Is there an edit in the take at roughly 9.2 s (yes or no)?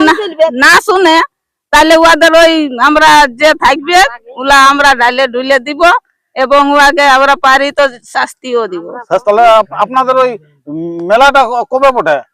yes